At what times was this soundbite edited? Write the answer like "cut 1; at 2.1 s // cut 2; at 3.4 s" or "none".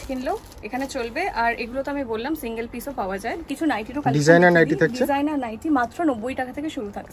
cut 1; at 3.3 s